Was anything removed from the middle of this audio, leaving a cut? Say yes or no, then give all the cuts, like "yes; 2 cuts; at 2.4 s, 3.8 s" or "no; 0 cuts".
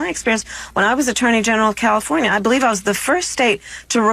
no; 0 cuts